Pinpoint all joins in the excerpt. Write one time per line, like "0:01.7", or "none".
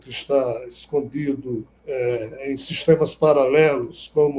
0:01.7